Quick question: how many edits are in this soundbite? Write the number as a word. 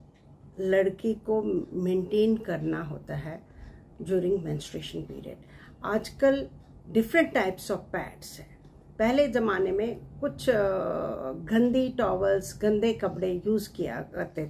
zero